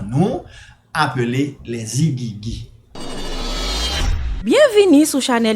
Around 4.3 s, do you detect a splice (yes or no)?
no